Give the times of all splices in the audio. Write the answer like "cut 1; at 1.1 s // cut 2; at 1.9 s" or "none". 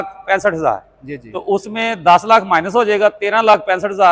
none